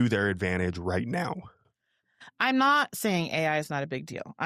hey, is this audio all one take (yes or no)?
no